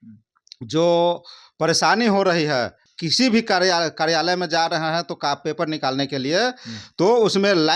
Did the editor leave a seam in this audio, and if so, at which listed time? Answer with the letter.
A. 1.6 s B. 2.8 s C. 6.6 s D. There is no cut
B